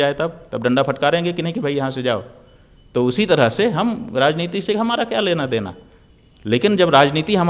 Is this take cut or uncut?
uncut